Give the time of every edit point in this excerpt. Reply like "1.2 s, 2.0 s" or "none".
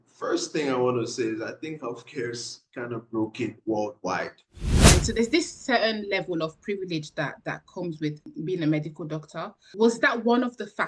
4.8 s